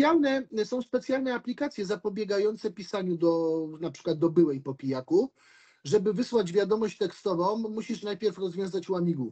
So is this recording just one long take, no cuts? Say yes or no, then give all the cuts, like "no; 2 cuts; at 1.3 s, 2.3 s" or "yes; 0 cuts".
yes; 0 cuts